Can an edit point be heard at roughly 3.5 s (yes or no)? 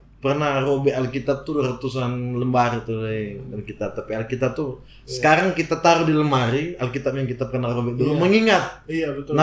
no